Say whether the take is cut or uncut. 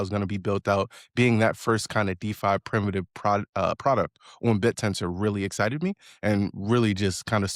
uncut